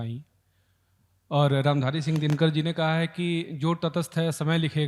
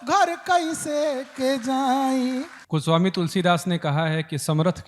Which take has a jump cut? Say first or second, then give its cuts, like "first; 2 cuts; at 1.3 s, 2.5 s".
second; 1 cut; at 2.6 s